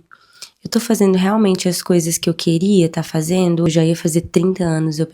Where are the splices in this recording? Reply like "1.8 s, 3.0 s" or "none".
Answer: 3.7 s